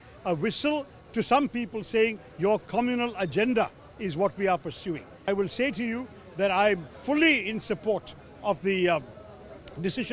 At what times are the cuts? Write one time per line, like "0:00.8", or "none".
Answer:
0:05.3